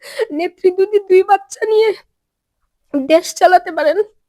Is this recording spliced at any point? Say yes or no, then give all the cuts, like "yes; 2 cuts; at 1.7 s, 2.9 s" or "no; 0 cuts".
no; 0 cuts